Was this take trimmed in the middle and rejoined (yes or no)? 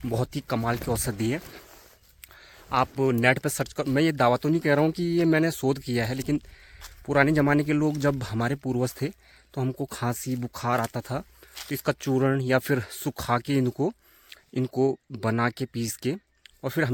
no